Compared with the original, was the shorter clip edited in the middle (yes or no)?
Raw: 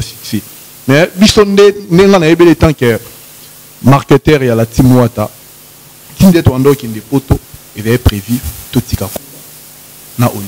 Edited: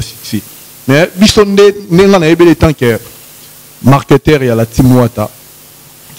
no